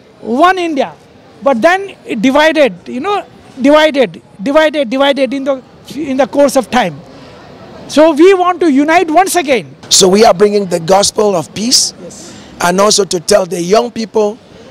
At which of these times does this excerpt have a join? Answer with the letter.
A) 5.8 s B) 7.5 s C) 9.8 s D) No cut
C